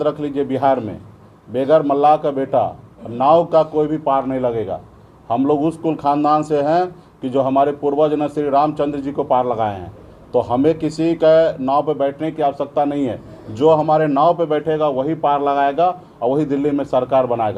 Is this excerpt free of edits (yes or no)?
yes